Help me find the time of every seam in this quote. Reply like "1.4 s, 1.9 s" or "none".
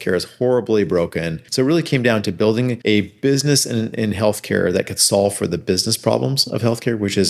1.4 s, 2.8 s